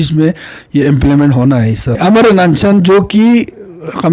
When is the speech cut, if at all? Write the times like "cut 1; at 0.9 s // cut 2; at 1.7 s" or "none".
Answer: cut 1; at 2.0 s